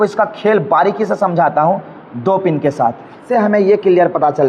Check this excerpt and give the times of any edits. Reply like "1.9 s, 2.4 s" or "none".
3.2 s